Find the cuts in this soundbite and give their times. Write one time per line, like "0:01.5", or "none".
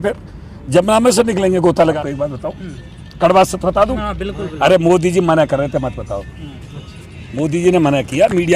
0:01.9